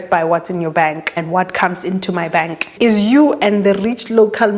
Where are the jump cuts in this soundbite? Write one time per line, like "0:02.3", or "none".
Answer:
0:01.1
0:02.7

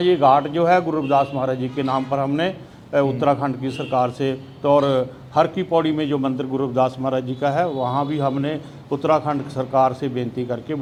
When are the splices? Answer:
none

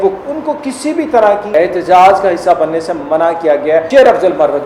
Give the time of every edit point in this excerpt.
0:01.5
0:03.9

